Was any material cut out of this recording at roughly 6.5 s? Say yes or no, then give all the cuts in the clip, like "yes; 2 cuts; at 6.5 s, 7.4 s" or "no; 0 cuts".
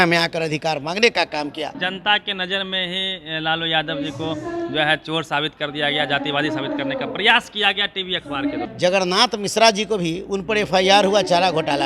no; 2 cuts; at 1.8 s, 8.7 s